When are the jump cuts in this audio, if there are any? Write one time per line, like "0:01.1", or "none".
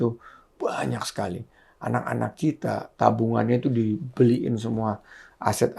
none